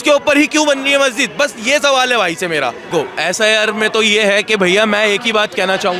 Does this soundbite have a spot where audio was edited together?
yes; 1 cut; at 2.9 s

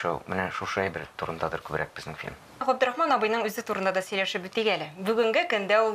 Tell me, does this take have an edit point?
yes; 1 cut; at 2.6 s

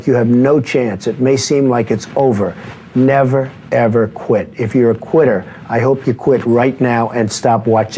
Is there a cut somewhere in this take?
no; 0 cuts

